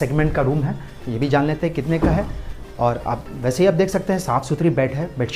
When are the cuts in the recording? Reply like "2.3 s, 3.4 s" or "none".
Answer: none